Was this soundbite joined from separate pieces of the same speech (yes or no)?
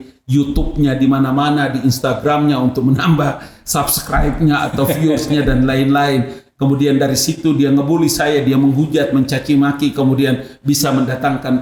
no